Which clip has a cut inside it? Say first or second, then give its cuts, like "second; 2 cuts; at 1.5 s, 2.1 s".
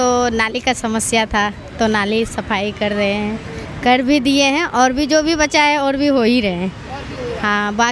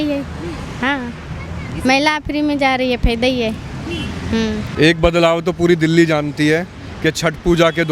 second; 1 cut; at 4.6 s